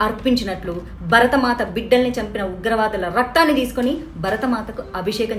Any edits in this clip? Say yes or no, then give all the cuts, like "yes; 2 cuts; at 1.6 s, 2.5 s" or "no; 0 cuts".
no; 0 cuts